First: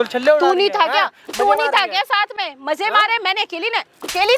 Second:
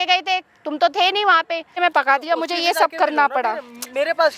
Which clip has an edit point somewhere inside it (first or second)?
second